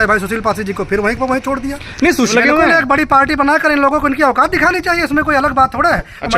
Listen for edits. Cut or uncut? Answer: cut